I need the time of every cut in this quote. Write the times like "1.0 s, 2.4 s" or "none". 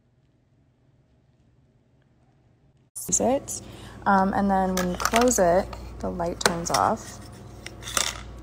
3.1 s